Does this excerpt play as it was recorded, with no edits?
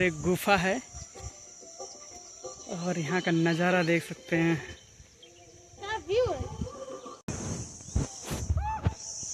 no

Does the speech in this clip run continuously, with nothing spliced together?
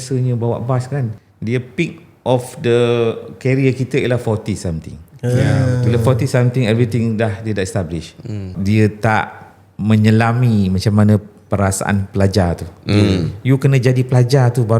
no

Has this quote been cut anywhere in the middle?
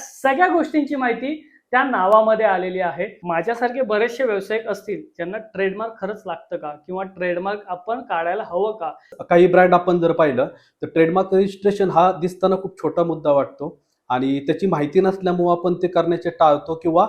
yes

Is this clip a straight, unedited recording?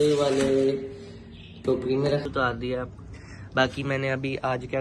no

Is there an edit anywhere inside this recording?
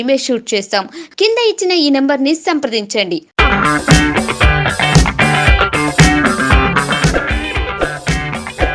no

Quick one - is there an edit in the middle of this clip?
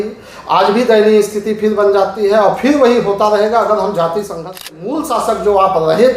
yes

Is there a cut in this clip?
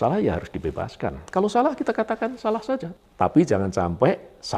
yes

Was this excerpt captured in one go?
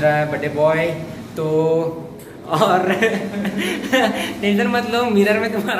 yes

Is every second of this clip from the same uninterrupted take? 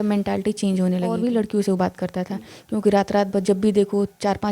no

